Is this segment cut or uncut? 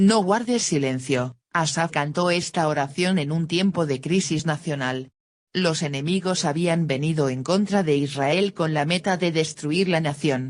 uncut